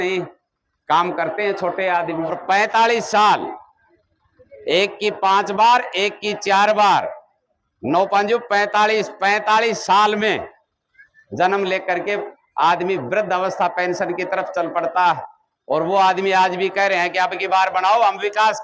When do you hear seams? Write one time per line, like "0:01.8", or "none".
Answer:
0:02.4